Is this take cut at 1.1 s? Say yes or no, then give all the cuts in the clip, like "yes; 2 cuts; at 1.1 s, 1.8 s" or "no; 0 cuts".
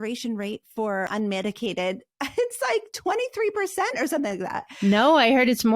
yes; 2 cuts; at 1.1 s, 4.6 s